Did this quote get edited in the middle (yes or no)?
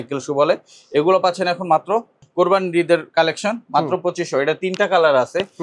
yes